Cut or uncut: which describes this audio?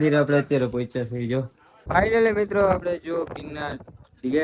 cut